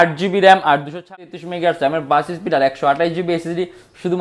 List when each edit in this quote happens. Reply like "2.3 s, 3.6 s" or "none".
1.0 s